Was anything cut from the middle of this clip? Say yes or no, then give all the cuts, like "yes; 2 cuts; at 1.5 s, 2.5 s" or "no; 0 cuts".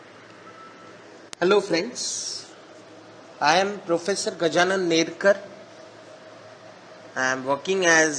no; 0 cuts